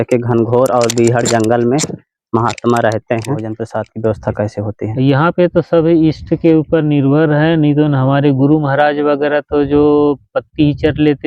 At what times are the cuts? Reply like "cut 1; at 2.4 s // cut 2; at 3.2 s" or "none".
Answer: cut 1; at 3.6 s